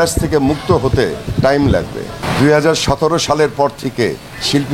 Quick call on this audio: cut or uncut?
cut